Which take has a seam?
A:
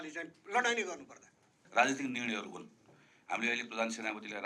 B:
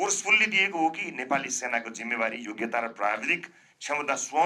A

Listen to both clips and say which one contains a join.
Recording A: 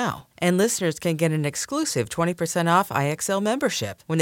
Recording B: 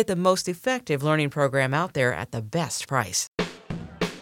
B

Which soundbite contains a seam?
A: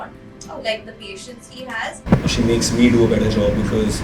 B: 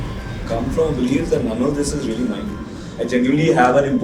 A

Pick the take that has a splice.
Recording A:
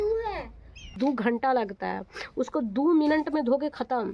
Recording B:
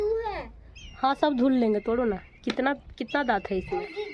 A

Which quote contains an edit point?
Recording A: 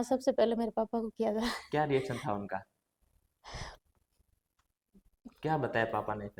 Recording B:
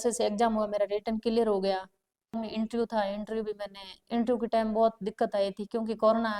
B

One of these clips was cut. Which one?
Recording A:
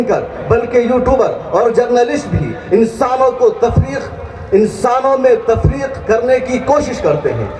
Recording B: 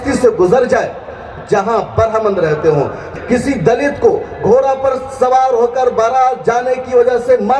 B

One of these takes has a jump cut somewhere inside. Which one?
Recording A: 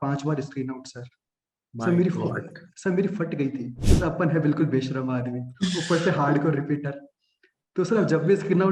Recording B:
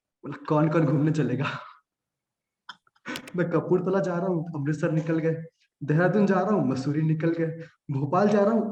A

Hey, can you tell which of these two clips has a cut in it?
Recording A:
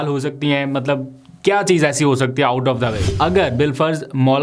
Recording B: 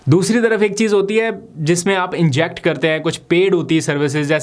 A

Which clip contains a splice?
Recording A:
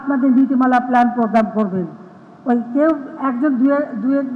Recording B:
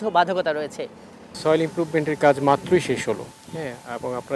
B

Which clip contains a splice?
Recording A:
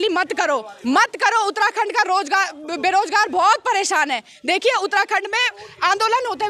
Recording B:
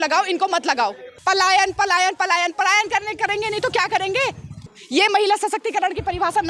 B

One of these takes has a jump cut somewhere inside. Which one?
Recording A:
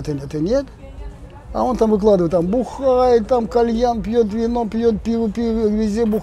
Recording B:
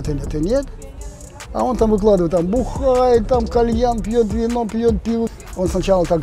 B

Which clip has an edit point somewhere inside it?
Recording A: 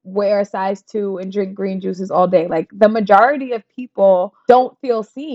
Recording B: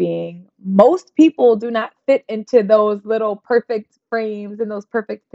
A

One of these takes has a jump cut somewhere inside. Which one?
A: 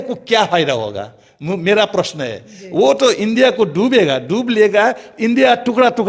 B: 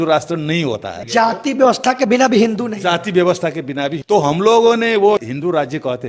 B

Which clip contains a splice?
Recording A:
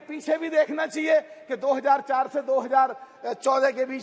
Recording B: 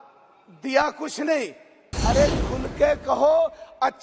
B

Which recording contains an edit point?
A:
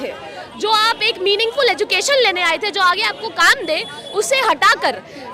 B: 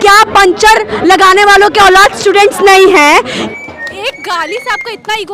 B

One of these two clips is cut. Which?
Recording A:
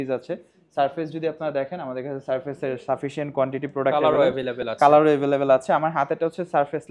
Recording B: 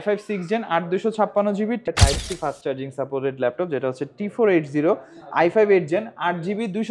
B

